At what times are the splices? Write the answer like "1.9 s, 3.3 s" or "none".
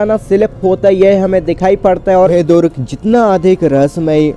2.3 s